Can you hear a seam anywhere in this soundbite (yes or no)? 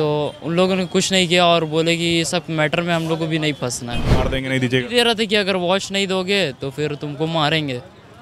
yes